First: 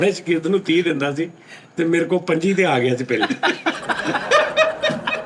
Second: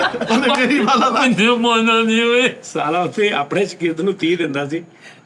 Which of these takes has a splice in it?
second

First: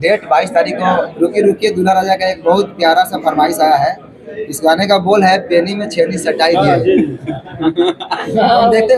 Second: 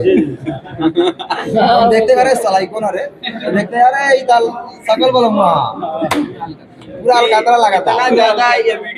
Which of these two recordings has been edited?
first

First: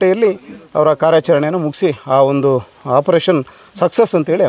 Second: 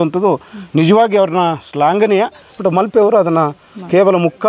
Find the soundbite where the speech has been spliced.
second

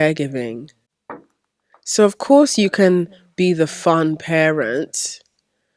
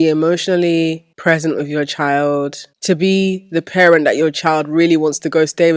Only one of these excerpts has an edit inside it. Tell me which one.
second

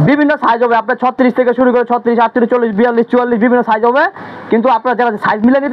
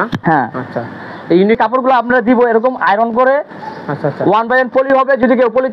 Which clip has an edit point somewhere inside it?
second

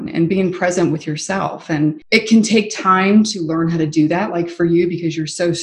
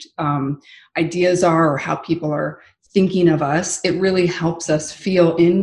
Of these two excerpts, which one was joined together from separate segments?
first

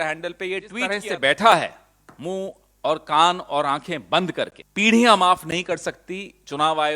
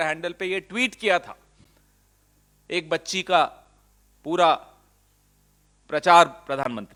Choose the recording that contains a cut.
first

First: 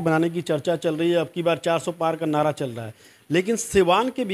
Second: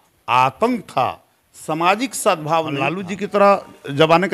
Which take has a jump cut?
second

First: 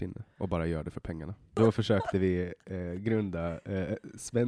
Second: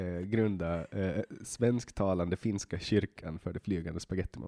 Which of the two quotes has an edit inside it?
first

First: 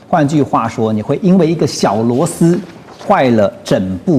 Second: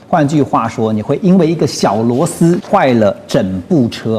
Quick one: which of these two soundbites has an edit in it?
second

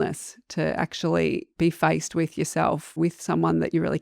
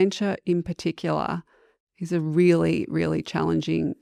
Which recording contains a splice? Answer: first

